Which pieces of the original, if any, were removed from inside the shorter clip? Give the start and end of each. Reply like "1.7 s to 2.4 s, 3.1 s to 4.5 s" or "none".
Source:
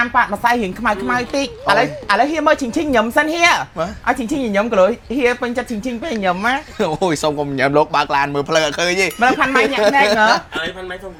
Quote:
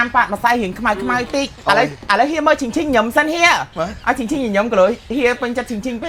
none

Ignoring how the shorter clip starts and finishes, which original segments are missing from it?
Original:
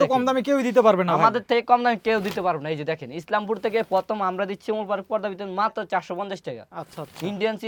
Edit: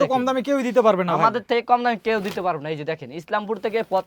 none

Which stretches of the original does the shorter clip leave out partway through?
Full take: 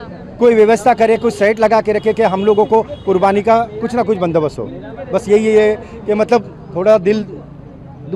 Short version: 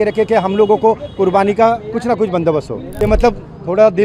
4.7 s to 5.9 s

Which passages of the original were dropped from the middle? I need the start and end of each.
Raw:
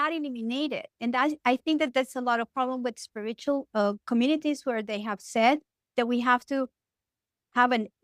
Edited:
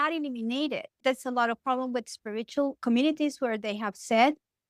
1.0 s to 1.9 s, 3.7 s to 4.0 s

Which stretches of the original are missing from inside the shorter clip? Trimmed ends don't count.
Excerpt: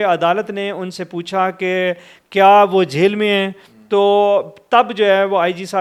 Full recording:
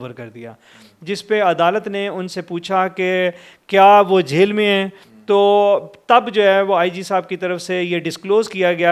none

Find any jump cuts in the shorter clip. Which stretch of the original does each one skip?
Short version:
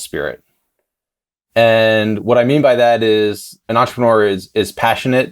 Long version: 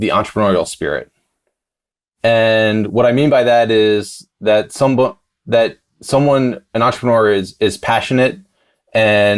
4.3 s to 6.6 s

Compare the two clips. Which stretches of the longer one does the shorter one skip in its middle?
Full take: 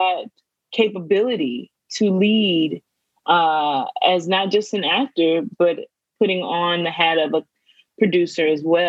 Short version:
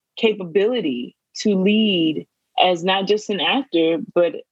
3.0 s to 3.9 s

